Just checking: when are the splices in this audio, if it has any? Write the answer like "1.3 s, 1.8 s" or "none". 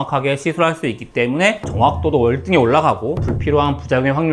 none